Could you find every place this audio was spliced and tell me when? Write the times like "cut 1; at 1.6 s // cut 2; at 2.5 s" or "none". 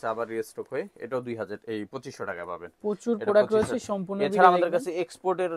none